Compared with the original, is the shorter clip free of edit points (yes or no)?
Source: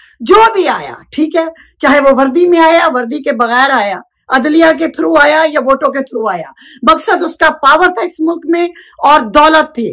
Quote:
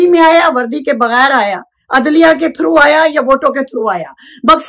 yes